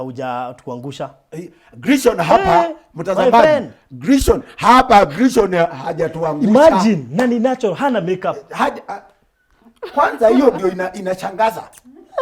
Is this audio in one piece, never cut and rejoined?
yes; 0 cuts

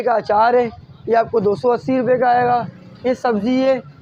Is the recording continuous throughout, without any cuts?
yes; 0 cuts

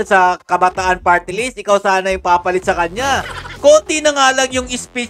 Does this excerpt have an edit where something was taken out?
yes; 1 cut; at 3.4 s

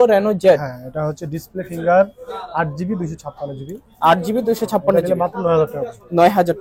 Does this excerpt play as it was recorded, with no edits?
yes; 0 cuts

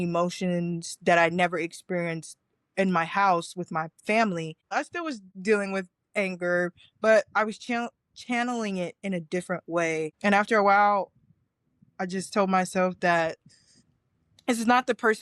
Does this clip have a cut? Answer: yes; 1 cut; at 4.7 s

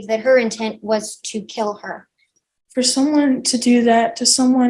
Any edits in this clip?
yes; 1 cut; at 2.4 s

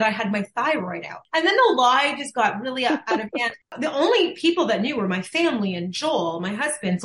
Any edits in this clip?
yes; 2 cuts; at 1.1 s, 3.6 s

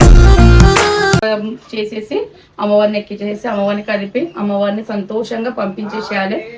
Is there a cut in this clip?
yes; 1 cut; at 1.2 s

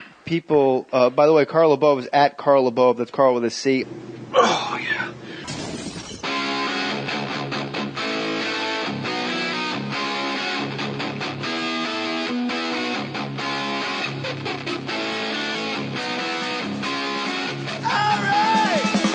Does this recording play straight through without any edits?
yes; 0 cuts

